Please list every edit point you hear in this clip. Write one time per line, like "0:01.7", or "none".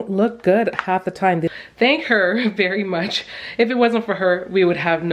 0:01.5